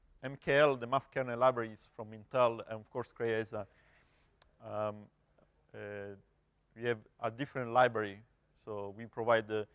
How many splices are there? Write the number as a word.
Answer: zero